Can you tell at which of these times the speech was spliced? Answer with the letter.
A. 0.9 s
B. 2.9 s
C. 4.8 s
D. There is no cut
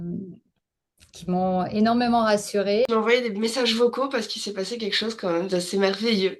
B